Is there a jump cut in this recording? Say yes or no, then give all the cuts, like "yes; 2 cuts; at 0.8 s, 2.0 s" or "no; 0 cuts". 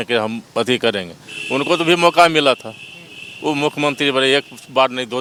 no; 0 cuts